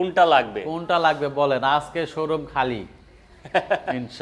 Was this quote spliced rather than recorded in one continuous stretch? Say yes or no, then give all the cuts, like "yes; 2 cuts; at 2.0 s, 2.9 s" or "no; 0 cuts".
no; 0 cuts